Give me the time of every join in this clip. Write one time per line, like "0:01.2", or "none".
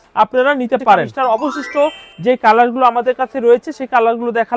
0:01.1